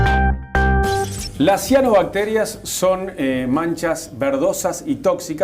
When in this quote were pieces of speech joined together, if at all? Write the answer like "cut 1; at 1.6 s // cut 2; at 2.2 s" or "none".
cut 1; at 0.9 s